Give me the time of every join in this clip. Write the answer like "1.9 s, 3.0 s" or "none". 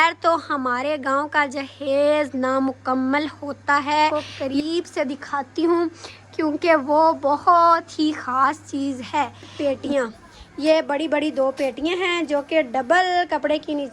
4.1 s, 9.5 s